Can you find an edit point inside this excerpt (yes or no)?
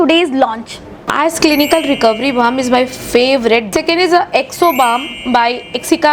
yes